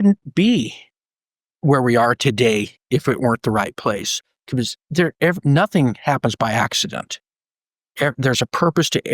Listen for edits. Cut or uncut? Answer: uncut